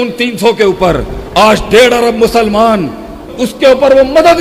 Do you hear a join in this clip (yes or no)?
yes